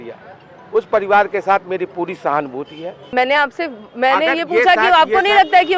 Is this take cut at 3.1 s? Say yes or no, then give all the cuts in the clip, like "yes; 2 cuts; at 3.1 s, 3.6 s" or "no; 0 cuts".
no; 0 cuts